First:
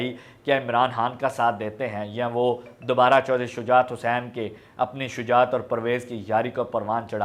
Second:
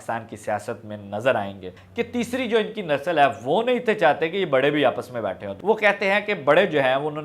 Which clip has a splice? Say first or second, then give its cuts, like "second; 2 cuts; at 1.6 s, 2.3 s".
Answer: second; 2 cuts; at 1.8 s, 5.5 s